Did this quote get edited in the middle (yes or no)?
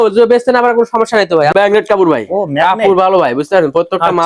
yes